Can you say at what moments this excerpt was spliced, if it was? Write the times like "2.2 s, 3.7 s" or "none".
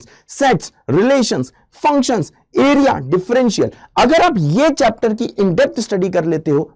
none